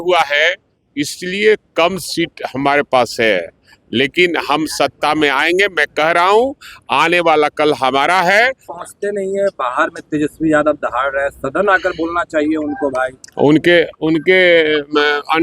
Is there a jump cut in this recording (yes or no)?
yes